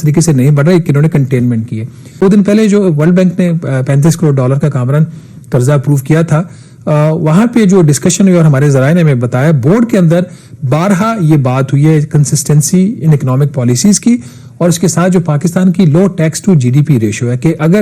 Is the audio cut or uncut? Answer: cut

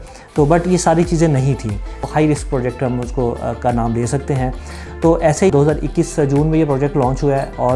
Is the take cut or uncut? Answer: cut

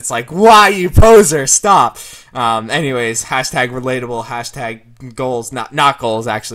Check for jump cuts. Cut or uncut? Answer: uncut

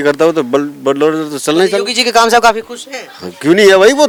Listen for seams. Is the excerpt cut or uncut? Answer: uncut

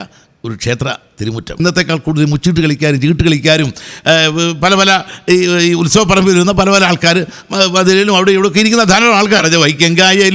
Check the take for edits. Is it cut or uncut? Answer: cut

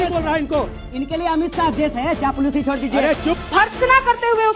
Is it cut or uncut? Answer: cut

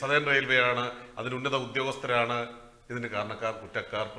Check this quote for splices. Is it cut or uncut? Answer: uncut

